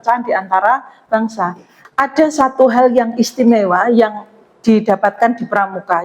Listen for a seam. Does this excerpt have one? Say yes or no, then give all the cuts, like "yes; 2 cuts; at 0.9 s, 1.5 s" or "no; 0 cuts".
yes; 1 cut; at 1.8 s